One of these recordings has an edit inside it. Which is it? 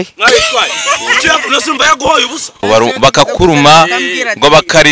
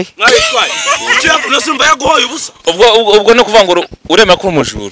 first; 1 cut; at 2.6 s

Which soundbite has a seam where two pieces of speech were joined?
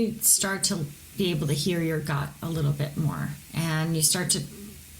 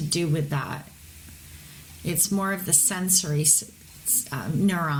first; 1 cut; at 3.4 s

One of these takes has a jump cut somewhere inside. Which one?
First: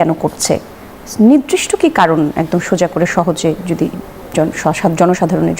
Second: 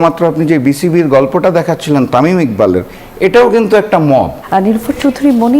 second; 1 cut; at 4.4 s

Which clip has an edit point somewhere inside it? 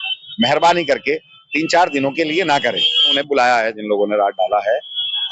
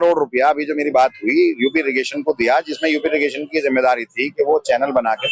first; 1 cut; at 3.2 s

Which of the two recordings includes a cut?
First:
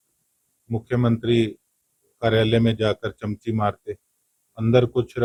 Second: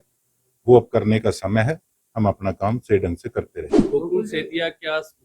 second; 1 cut; at 3.7 s

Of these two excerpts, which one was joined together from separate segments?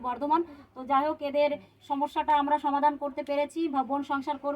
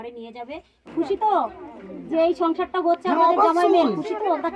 second; 1 cut; at 0.9 s

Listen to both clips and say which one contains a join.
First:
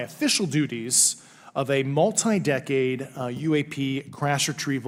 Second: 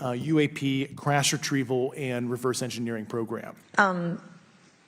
second; 1 cut; at 3.6 s

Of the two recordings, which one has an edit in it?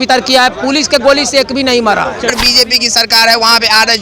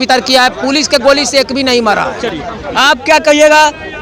first; 1 cut; at 2.4 s

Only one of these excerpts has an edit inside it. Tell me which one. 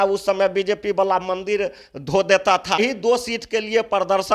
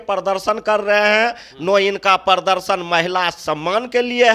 first; 1 cut; at 2.8 s

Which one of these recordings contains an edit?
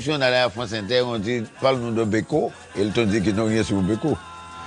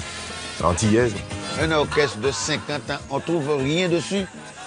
second; 1 cut; at 1.4 s

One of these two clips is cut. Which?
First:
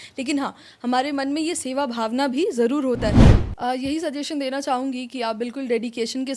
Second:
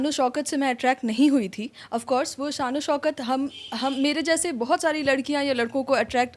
first; 1 cut; at 3.4 s

